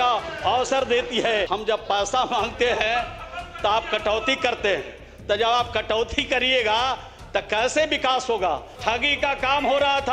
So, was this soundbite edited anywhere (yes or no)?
yes